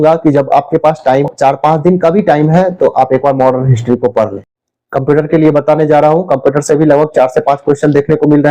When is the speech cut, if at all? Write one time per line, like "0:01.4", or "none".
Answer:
0:01.3
0:04.5